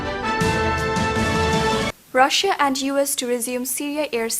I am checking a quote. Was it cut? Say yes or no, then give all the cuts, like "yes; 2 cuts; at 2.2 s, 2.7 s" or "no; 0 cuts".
yes; 1 cut; at 1.9 s